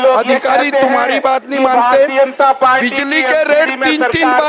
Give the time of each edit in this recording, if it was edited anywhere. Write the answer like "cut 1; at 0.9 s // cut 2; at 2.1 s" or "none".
none